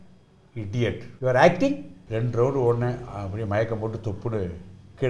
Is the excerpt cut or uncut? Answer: cut